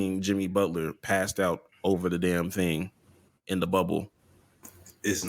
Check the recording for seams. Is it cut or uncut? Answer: uncut